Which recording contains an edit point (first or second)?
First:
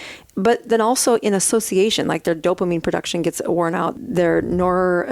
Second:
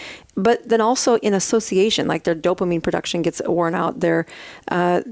first